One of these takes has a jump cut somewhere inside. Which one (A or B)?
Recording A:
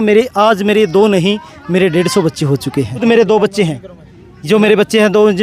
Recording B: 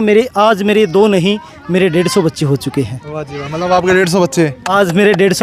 A